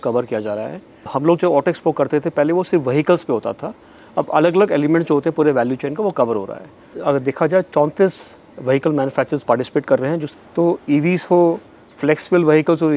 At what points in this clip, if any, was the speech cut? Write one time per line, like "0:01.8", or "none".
0:01.0
0:06.9
0:10.2